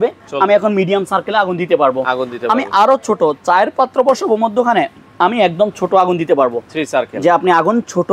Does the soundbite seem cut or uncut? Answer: cut